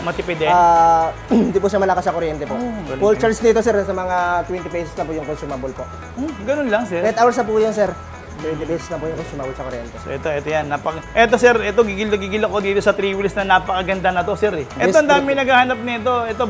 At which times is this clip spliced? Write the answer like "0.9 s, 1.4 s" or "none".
11.0 s, 14.8 s